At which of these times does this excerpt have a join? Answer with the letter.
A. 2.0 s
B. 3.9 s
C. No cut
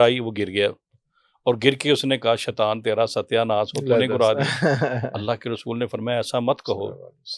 C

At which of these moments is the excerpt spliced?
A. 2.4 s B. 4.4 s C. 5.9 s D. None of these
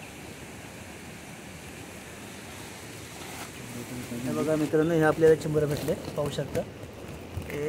B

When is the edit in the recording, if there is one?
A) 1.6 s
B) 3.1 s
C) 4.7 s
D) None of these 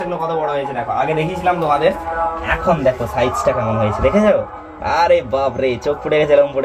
D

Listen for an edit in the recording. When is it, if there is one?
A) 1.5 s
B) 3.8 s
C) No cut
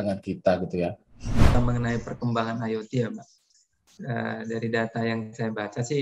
A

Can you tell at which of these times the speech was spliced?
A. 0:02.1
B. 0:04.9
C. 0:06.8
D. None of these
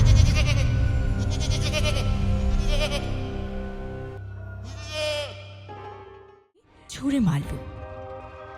C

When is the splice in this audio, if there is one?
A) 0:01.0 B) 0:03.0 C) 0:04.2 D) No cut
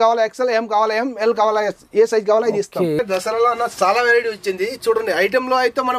B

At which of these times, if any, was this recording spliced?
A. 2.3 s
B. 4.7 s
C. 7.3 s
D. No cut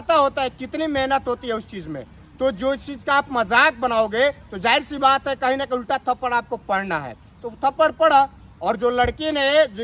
D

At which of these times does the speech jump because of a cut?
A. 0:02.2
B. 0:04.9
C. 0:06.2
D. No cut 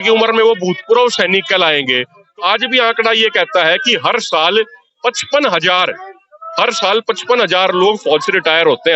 A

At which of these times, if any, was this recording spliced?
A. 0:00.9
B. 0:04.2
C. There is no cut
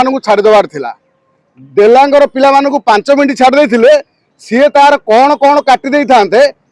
C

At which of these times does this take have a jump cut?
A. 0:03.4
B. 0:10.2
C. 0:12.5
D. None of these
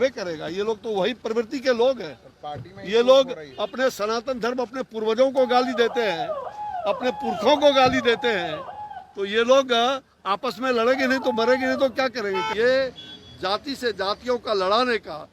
C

